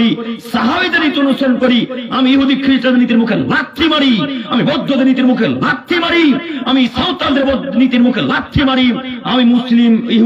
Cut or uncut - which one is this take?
uncut